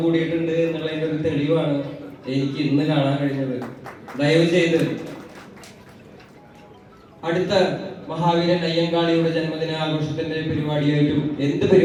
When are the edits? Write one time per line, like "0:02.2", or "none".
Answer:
none